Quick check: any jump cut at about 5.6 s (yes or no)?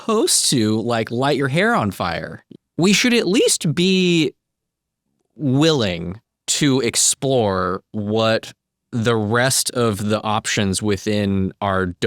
no